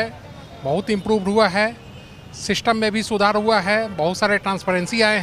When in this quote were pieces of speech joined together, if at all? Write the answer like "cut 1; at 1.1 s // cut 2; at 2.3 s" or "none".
none